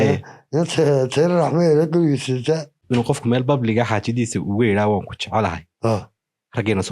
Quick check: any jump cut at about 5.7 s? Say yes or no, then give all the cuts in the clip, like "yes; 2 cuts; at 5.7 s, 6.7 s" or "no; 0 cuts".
no; 1 cut; at 2.8 s